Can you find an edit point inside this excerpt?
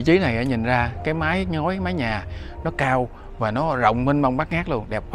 no; 0 cuts

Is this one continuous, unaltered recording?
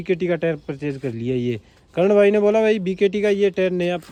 yes; 0 cuts

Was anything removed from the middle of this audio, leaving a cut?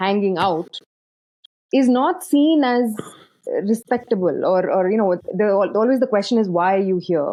no; 0 cuts

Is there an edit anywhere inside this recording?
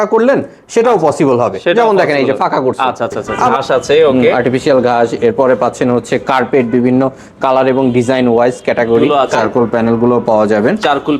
yes; 2 cuts; at 3.5 s, 9.1 s

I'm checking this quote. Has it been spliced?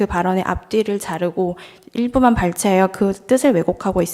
no; 0 cuts

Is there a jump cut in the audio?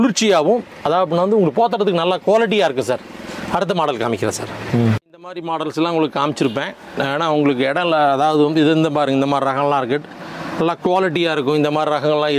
yes; 1 cut; at 5.2 s

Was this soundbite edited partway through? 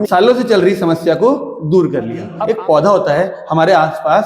yes; 1 cut; at 2.3 s

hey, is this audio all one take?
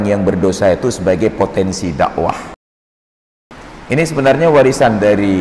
no; 1 cut; at 3.2 s

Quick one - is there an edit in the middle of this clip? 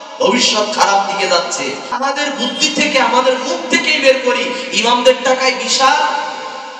yes; 1 cut; at 2.0 s

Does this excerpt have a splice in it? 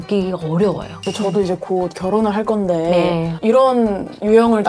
yes; 1 cut; at 0.9 s

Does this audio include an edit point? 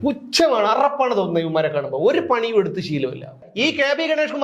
yes; 1 cut; at 3.4 s

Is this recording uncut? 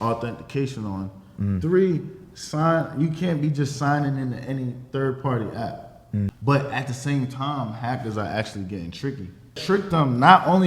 no; 2 cuts; at 6.3 s, 9.6 s

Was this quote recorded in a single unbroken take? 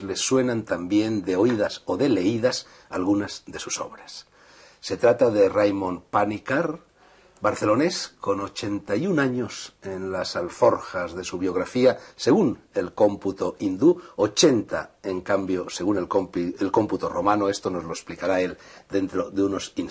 yes; 0 cuts

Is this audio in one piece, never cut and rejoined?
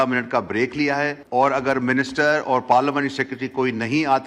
no; 1 cut; at 1.2 s

